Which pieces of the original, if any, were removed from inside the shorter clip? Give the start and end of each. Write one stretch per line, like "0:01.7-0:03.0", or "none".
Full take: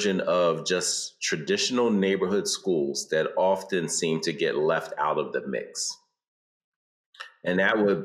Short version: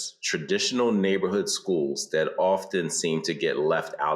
none

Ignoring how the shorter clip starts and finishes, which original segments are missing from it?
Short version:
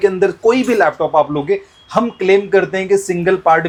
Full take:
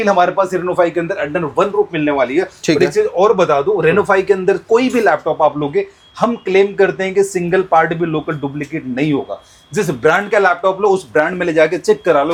none

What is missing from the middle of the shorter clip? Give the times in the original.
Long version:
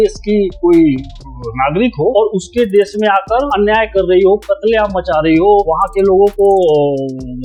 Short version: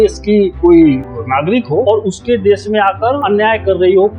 0:01.1-0:01.4

